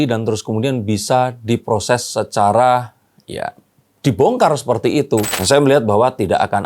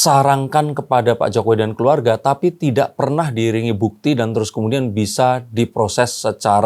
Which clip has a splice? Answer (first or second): first